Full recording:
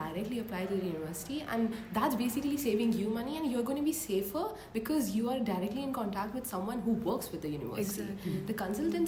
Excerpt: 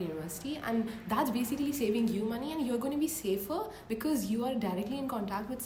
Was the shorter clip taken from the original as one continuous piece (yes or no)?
yes